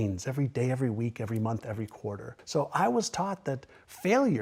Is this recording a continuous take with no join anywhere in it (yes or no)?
no